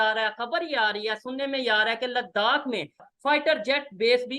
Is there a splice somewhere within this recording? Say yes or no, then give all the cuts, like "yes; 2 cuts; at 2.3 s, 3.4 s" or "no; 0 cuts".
yes; 1 cut; at 3.1 s